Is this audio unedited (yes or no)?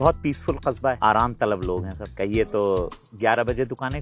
no